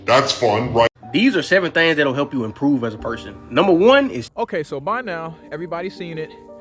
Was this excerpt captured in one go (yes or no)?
no